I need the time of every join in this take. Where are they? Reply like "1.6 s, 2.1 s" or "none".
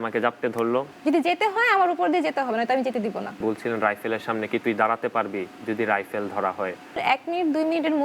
0.9 s, 3.4 s, 6.9 s